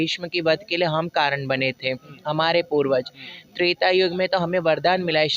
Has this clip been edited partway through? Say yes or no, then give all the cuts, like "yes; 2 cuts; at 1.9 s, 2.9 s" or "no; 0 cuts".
no; 0 cuts